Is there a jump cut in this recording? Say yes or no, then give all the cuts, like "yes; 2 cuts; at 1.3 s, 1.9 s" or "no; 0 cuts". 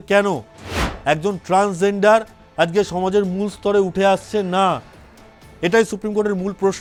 no; 0 cuts